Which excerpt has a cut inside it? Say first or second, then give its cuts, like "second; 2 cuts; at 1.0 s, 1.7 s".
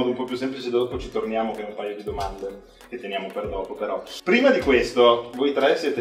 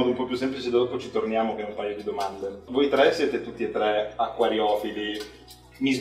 second; 1 cut; at 2.6 s